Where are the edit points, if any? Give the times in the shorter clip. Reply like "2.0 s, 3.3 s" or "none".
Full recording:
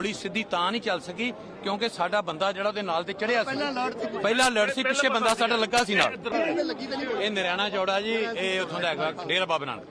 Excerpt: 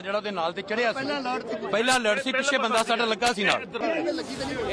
none